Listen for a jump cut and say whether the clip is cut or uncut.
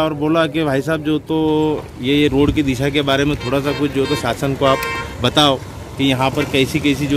uncut